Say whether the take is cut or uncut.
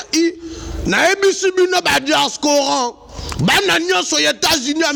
uncut